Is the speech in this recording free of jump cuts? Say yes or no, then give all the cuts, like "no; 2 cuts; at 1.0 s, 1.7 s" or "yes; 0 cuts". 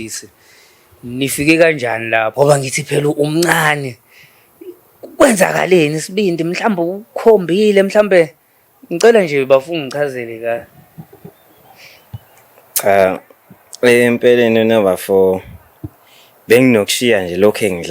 no; 1 cut; at 2.3 s